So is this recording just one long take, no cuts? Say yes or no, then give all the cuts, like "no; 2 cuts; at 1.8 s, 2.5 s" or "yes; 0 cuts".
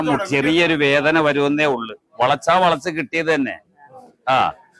yes; 0 cuts